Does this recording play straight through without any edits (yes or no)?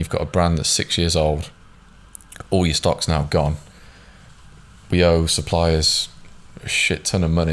yes